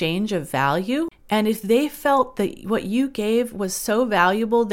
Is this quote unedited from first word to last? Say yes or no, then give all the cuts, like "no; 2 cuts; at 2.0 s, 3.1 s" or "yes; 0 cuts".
no; 1 cut; at 1.2 s